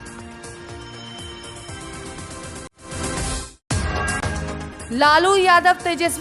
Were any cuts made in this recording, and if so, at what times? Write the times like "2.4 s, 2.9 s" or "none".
2.7 s, 4.6 s